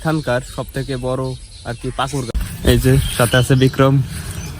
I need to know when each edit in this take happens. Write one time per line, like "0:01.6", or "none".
0:02.3

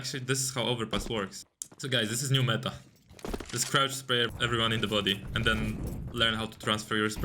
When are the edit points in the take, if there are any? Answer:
0:01.4
0:04.3

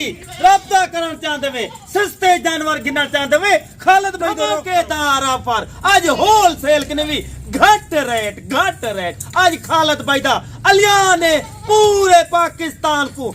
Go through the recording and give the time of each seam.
0:04.4

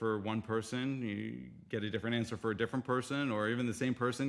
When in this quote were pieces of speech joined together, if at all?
none

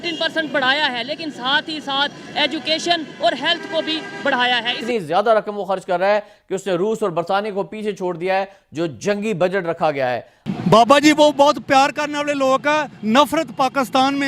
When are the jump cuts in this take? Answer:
0:04.8
0:10.4

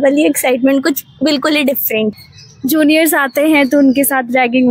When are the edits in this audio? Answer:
0:02.2

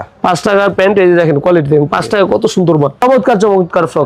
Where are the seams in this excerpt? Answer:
0:03.0

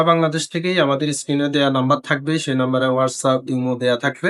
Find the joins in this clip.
none

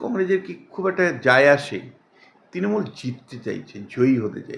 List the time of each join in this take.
none

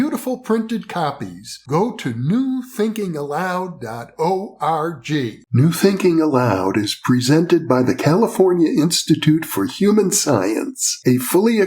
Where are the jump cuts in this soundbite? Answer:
0:05.4

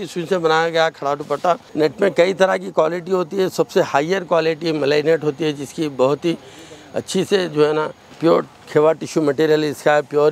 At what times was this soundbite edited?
0:01.7
0:08.0

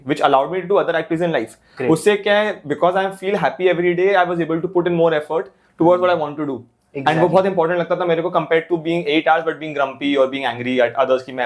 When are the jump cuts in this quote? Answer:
none

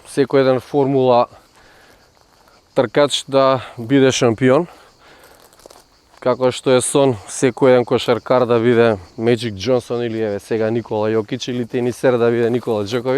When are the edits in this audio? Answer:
none

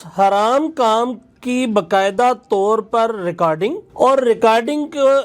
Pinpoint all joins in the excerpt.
0:03.8

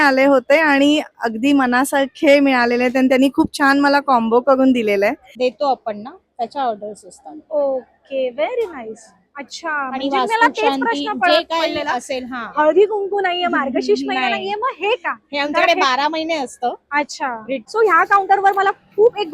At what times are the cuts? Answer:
0:05.3
0:17.6

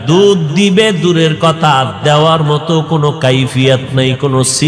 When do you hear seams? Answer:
none

